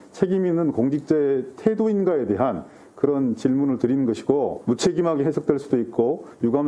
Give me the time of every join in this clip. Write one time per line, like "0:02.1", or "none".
0:04.6